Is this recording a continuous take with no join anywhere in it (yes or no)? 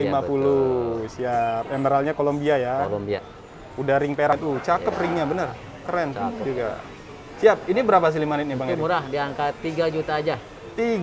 no